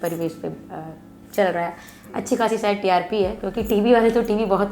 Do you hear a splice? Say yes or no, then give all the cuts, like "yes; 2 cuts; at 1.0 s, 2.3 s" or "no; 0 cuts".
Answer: no; 0 cuts